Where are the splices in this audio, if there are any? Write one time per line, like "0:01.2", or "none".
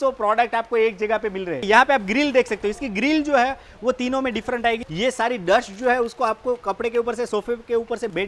0:01.6
0:04.8